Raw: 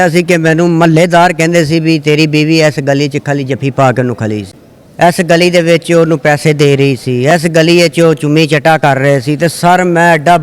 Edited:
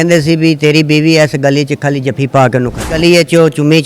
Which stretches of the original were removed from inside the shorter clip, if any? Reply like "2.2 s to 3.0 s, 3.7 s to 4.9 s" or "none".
4.4 s to 7.6 s